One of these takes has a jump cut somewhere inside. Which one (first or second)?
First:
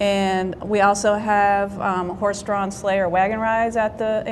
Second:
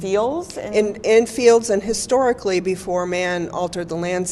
first